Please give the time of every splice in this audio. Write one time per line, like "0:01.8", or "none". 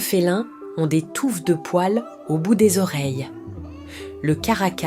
none